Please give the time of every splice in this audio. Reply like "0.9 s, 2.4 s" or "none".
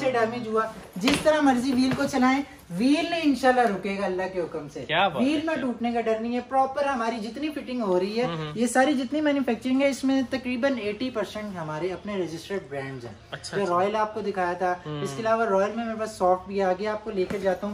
none